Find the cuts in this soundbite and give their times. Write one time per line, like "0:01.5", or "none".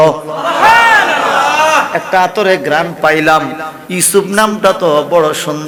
none